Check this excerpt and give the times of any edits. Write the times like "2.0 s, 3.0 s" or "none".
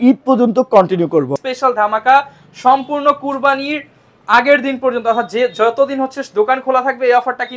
1.4 s